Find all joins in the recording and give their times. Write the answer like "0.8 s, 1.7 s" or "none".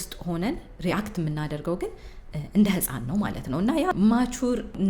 3.9 s